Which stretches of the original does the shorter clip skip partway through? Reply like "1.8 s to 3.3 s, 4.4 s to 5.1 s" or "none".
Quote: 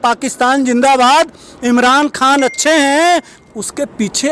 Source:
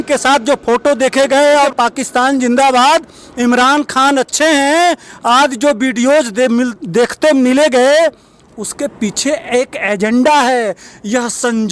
5.1 s to 8.4 s

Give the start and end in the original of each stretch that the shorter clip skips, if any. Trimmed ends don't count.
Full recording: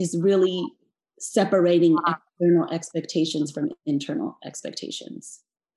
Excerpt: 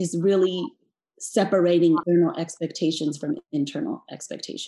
2.0 s to 2.4 s

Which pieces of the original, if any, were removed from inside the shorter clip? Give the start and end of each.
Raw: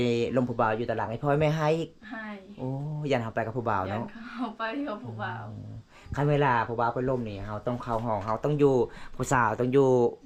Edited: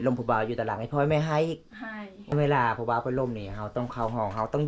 2.5 s to 6.1 s

